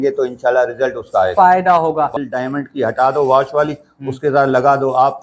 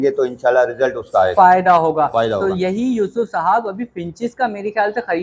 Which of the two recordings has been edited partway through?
first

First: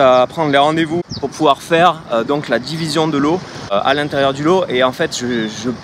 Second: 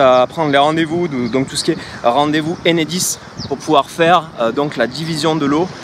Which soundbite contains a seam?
first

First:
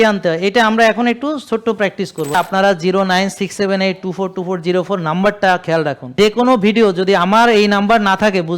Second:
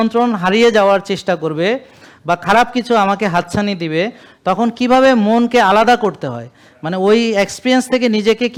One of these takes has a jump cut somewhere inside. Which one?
first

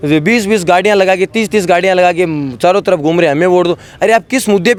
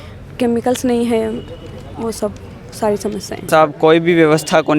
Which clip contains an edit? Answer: second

